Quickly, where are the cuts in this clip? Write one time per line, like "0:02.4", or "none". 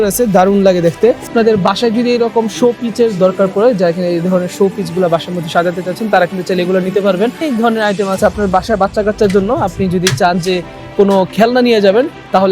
0:01.3
0:07.4